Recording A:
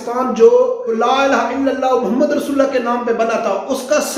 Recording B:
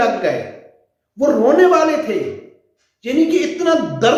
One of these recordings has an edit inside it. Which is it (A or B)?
A